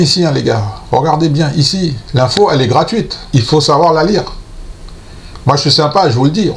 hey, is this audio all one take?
yes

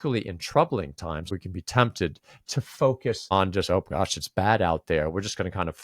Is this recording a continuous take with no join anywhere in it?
no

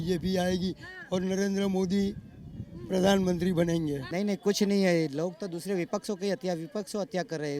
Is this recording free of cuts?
no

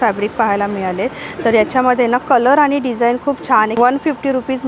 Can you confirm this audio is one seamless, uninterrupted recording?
no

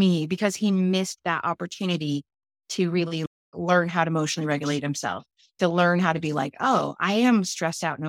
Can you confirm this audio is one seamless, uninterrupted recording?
yes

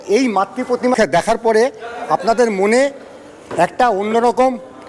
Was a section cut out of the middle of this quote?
yes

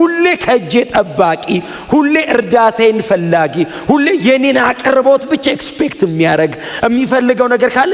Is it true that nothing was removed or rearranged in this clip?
yes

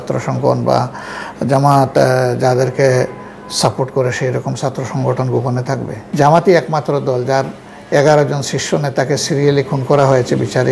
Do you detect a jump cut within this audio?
yes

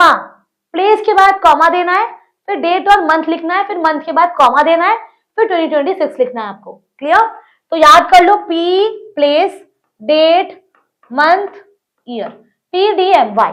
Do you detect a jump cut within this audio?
no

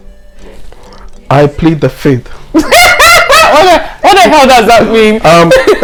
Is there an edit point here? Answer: no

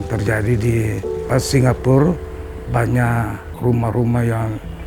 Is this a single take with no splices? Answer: no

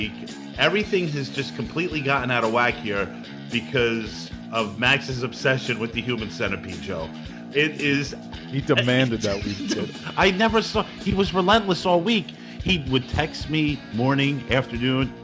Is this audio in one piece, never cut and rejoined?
yes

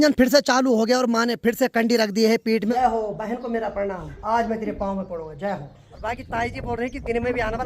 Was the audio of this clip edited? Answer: yes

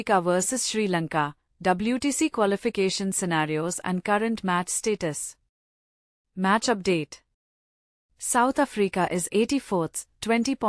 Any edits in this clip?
no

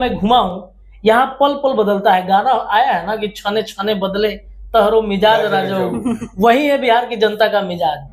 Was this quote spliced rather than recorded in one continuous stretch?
no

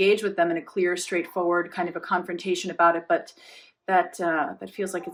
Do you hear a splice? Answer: no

